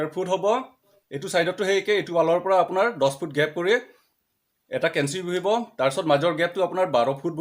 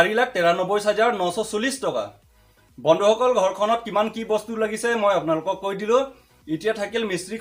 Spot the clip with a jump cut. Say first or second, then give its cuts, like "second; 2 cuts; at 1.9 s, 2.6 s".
first; 1 cut; at 1.0 s